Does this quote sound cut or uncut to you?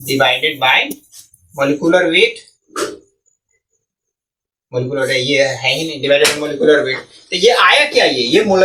uncut